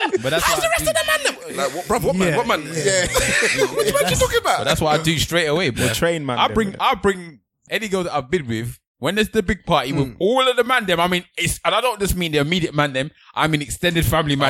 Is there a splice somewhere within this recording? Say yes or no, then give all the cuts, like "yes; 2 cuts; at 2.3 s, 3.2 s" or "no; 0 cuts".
yes; 1 cut; at 7.7 s